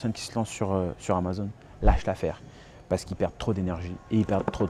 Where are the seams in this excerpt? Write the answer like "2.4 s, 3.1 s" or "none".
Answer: none